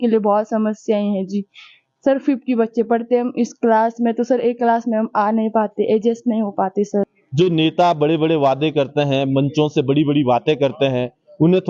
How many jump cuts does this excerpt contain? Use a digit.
1